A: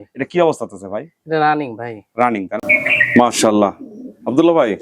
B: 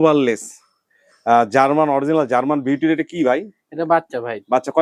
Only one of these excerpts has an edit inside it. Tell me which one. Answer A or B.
A